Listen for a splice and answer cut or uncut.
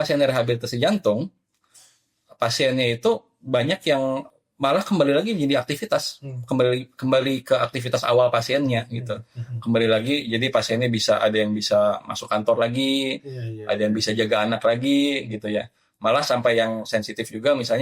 cut